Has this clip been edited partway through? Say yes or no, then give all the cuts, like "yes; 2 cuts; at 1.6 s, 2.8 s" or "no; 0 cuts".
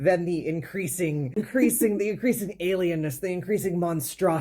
yes; 1 cut; at 1.3 s